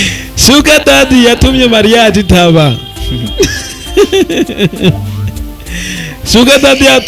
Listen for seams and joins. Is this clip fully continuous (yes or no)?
yes